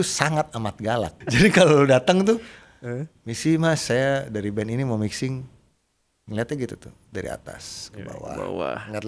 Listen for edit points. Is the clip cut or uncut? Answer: cut